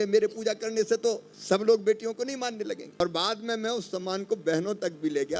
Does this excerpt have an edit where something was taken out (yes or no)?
yes